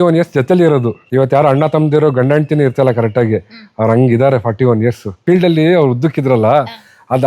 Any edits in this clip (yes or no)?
yes